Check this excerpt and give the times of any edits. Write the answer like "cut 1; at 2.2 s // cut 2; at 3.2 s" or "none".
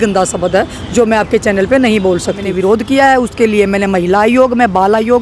cut 1; at 2.5 s